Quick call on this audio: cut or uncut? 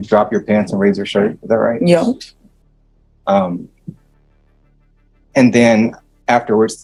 uncut